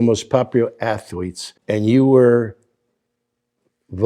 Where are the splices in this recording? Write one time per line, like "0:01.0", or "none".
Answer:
0:01.5